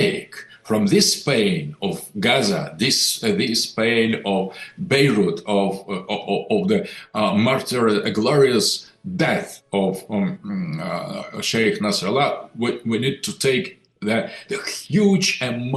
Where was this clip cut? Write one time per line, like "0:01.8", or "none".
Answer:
none